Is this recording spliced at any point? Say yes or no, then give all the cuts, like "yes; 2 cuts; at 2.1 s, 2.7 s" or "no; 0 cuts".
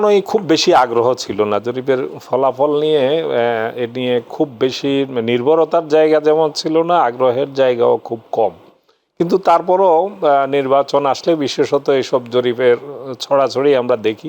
no; 0 cuts